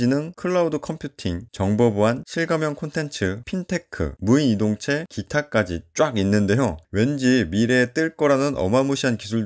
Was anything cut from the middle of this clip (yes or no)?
no